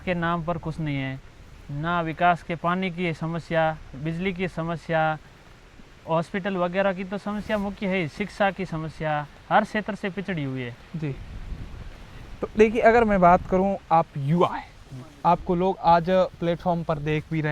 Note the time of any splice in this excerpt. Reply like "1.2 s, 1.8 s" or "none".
none